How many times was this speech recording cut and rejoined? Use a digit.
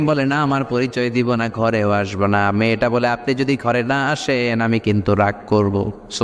0